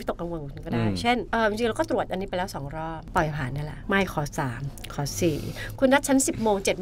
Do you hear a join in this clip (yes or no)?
no